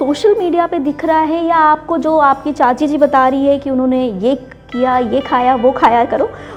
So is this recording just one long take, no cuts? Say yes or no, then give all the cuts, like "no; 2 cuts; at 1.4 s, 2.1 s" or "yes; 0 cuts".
yes; 0 cuts